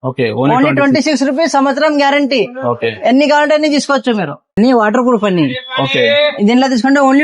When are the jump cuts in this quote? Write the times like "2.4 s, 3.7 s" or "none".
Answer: 4.6 s